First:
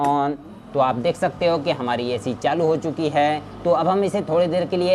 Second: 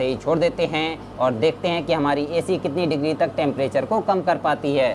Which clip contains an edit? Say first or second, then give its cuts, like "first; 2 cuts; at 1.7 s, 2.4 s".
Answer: first; 1 cut; at 3.5 s